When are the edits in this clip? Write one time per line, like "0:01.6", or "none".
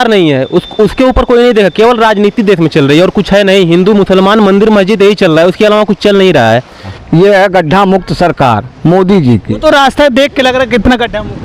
0:06.9